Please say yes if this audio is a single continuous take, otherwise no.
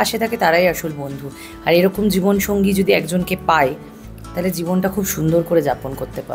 yes